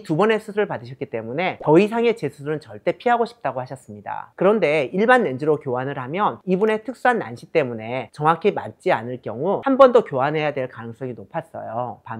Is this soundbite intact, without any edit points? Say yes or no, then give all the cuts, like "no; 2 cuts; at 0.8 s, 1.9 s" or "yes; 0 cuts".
yes; 0 cuts